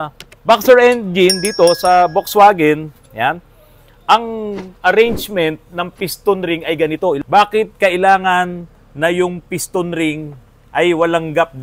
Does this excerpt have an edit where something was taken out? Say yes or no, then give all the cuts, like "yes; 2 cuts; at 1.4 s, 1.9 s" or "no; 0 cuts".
yes; 1 cut; at 7.2 s